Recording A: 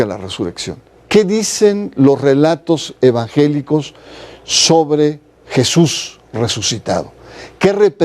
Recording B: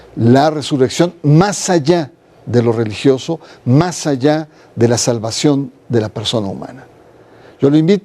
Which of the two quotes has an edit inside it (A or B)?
A